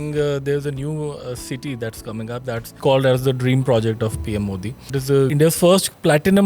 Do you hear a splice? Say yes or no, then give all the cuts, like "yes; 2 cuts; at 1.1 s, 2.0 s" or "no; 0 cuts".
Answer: yes; 2 cuts; at 2.7 s, 5.2 s